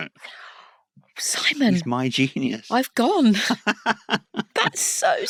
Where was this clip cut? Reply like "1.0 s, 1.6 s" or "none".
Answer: none